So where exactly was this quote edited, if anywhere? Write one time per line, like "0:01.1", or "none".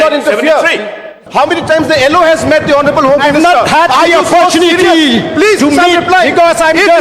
0:01.2

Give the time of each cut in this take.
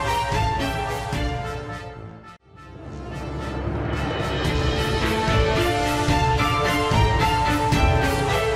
0:02.3

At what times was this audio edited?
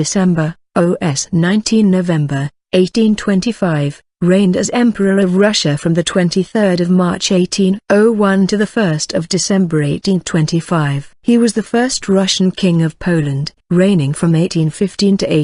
none

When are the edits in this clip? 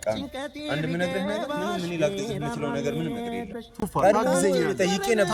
none

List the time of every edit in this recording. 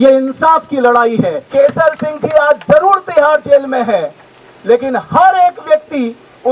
0:01.4

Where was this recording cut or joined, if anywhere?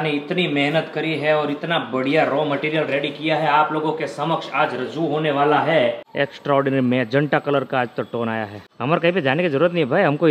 0:06.0

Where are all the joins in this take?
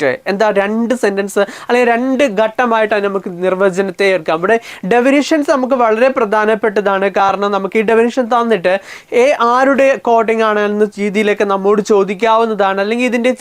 none

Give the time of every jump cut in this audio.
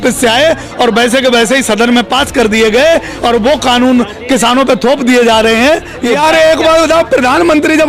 0:06.2

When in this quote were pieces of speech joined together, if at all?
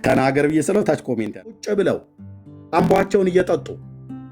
0:01.6

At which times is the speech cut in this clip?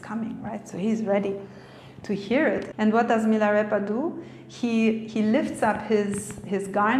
0:02.7

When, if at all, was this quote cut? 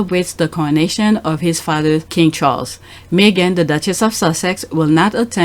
0:02.1

